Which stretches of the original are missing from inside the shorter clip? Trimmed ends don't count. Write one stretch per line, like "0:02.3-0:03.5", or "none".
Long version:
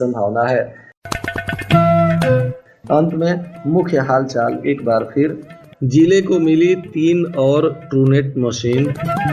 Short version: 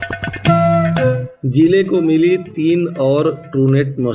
0:02.6-0:05.7